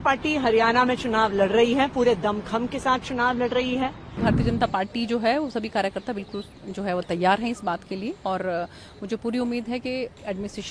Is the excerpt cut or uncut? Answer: cut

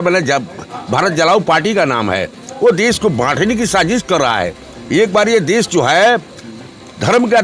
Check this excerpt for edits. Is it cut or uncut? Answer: uncut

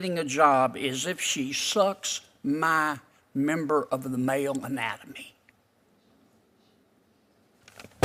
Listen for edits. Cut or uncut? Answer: uncut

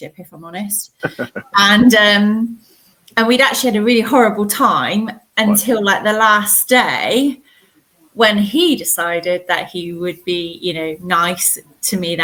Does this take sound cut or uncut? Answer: uncut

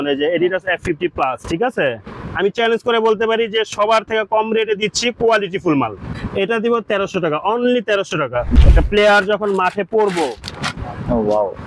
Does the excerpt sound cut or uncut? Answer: cut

